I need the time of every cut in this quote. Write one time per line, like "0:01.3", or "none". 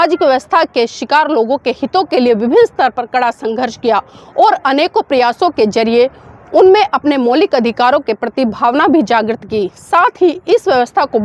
none